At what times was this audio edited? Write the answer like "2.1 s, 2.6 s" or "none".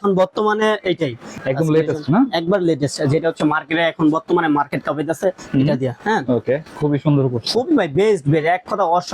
1.4 s, 6.7 s

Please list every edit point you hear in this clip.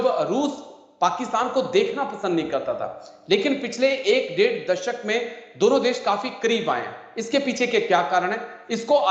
none

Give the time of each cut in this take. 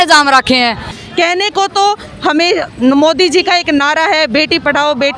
0.9 s

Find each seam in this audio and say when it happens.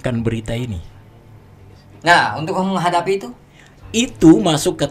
none

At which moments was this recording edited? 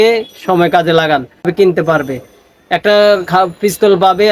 1.5 s

